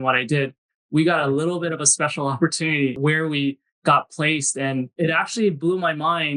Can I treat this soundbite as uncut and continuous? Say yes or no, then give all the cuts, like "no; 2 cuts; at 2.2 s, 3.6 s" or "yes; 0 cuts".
no; 2 cuts; at 3.0 s, 4.9 s